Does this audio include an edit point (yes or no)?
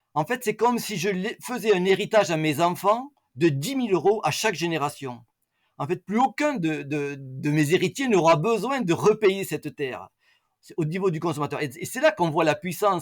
no